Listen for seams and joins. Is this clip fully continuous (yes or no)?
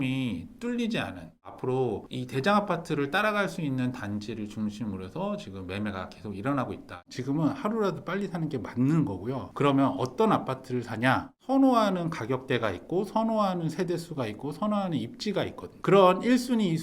no